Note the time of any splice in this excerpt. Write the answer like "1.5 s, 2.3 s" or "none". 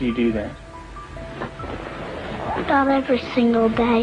none